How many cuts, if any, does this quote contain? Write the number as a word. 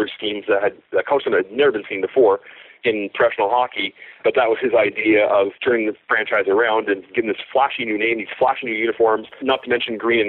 three